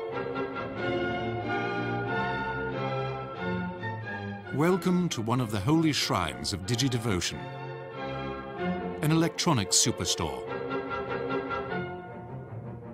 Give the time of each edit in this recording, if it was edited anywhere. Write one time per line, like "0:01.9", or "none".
0:04.1